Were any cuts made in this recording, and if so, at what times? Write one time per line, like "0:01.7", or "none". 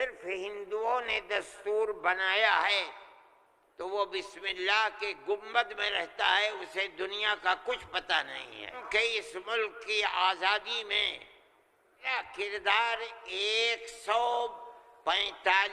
0:08.8
0:12.1

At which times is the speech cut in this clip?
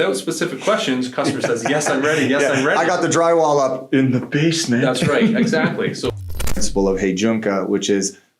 0:06.2

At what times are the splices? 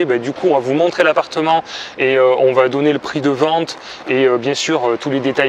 none

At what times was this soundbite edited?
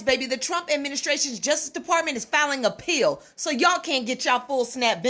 none

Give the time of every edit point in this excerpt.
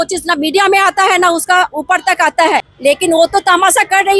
0:02.7

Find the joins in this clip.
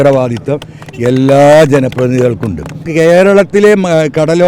0:02.8

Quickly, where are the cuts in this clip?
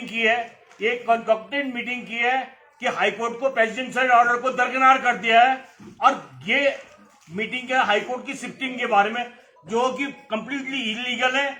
none

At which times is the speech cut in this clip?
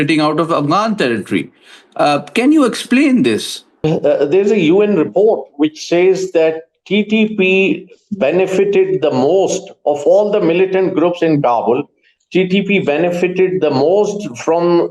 0:03.7

